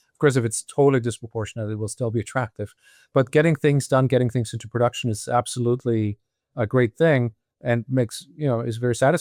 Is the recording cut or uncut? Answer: uncut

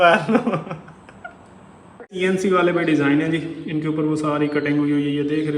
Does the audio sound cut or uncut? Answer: cut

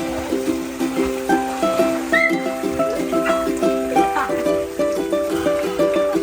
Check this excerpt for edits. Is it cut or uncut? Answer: uncut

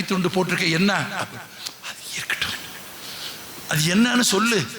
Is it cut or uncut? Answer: uncut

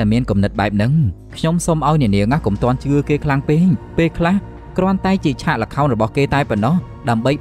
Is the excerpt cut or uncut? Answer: uncut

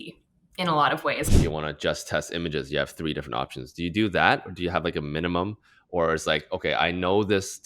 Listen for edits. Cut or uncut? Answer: cut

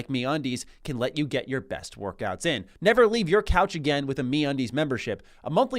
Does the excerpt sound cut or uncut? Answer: cut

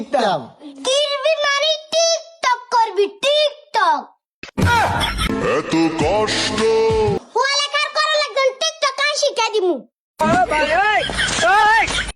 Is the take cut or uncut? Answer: cut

